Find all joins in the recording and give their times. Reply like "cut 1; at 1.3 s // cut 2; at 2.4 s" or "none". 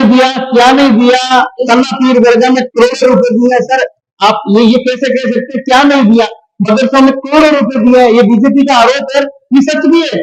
none